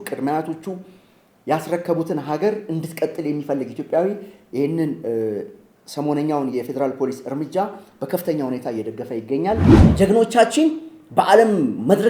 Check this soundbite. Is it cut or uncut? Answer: cut